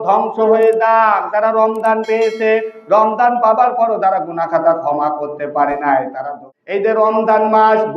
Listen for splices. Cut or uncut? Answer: cut